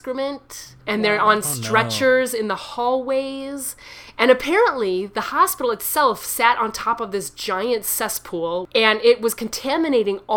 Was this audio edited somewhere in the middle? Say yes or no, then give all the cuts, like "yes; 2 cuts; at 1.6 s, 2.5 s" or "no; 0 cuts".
no; 0 cuts